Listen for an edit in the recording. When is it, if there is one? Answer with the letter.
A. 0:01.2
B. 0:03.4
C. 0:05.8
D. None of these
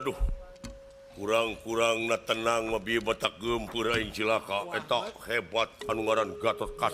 D